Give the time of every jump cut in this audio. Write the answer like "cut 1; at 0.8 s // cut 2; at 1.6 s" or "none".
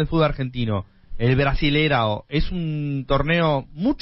none